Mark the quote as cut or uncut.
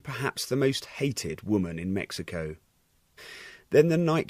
cut